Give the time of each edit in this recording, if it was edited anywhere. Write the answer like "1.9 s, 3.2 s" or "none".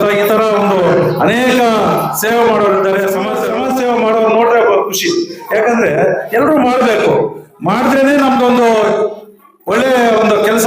3.4 s